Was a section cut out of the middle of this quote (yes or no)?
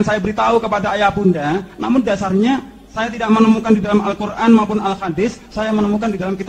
no